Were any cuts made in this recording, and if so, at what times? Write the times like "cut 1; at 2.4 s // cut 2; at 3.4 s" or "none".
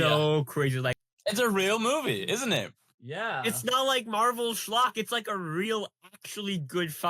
cut 1; at 1.1 s